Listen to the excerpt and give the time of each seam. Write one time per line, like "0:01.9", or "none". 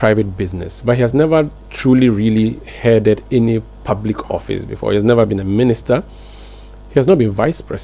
none